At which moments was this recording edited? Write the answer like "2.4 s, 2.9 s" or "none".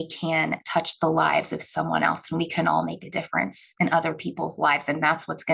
none